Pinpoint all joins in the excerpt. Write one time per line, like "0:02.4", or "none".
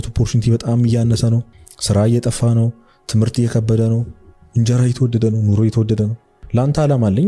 0:01.5
0:06.4